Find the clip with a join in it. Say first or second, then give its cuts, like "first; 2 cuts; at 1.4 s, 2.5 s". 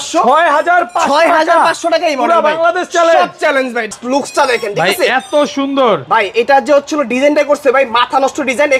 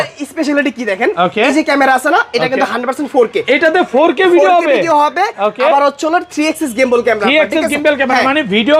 first; 1 cut; at 3.9 s